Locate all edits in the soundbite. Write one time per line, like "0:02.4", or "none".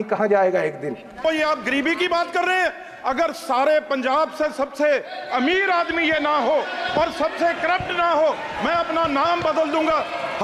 0:01.2